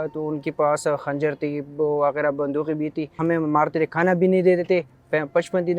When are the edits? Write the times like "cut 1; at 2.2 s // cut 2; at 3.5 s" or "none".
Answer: cut 1; at 3.2 s